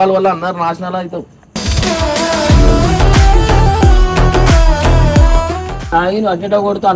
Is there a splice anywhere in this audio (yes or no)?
yes